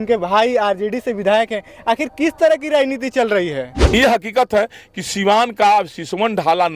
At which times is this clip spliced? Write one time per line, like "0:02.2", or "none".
0:03.9